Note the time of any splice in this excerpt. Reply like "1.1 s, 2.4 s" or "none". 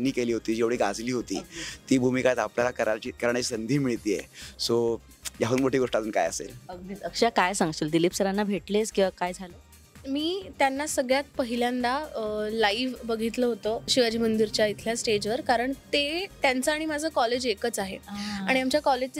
none